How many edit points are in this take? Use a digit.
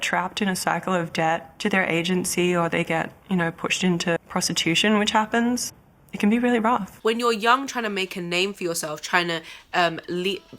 3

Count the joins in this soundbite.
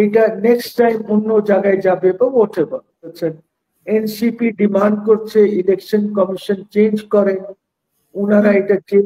1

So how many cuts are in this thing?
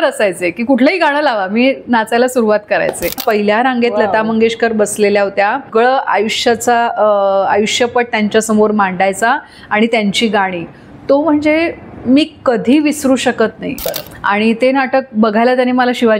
3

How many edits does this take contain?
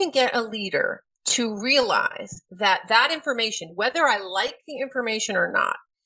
0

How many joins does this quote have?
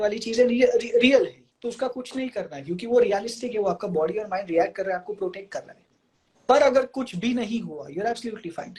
1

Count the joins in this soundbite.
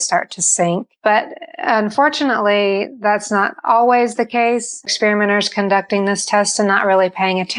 2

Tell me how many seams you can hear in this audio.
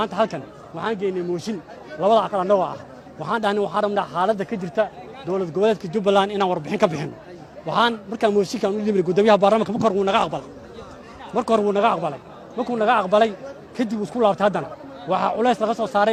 0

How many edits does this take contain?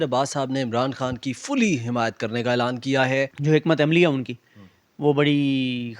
1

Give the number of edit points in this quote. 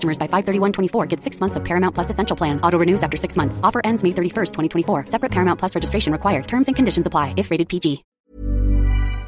1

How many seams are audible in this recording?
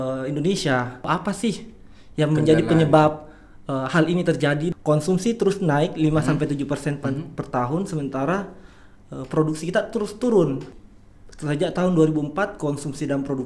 3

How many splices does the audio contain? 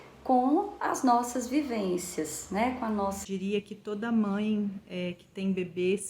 1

